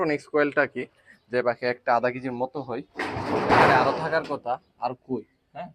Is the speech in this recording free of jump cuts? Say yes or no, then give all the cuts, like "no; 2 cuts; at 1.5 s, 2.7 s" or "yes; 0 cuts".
yes; 0 cuts